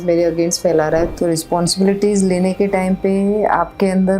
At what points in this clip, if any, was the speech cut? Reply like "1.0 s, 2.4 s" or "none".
1.1 s